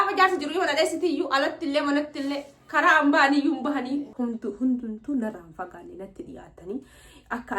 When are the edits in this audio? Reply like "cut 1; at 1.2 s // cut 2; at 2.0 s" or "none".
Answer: cut 1; at 4.1 s